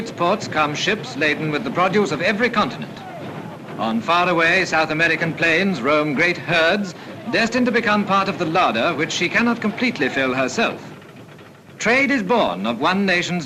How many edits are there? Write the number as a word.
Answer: zero